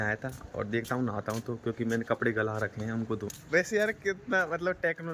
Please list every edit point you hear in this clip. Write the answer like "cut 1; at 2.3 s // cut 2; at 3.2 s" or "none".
cut 1; at 3.2 s